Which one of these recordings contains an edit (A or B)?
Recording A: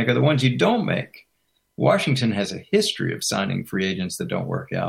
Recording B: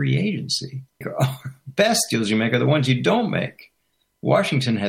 B